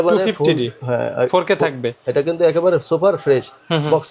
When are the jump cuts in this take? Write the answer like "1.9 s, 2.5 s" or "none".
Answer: 1.9 s